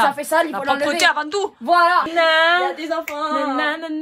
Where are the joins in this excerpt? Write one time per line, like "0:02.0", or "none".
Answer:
0:02.1